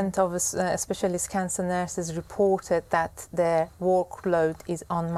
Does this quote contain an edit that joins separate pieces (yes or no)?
no